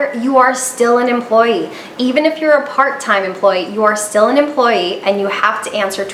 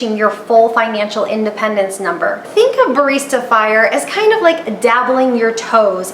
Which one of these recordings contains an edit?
second; 1 cut; at 2.5 s

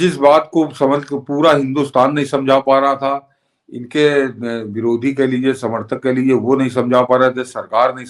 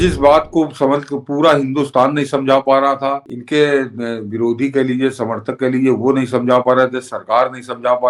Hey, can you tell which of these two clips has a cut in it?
second; 1 cut; at 3.3 s

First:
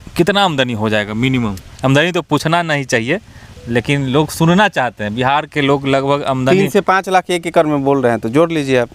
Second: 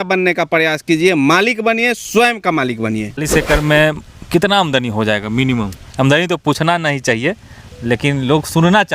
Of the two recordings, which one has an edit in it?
second; 1 cut; at 3.2 s

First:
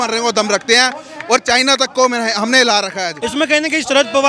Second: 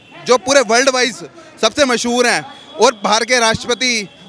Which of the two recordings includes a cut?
first; 1 cut; at 3.2 s

